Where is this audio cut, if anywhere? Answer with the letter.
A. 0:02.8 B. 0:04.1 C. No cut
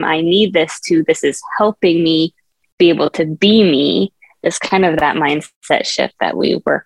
C